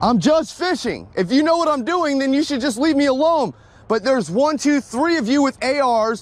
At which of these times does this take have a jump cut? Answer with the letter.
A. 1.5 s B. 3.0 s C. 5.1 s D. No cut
D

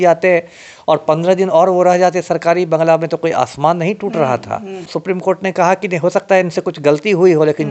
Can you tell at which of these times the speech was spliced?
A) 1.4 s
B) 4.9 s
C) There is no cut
B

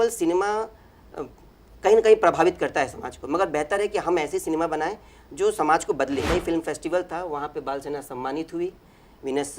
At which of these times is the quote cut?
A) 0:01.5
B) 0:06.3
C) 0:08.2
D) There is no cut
B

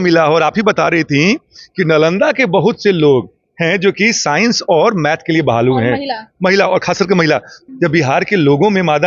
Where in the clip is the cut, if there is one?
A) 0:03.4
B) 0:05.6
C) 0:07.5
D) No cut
C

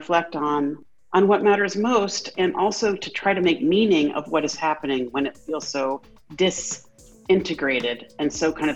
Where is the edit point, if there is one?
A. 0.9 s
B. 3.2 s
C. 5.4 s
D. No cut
A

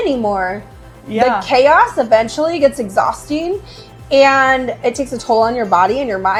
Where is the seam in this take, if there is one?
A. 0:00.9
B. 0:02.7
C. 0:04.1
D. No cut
D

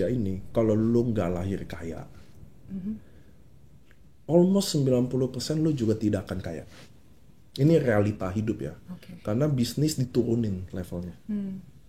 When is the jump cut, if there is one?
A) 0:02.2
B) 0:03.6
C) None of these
C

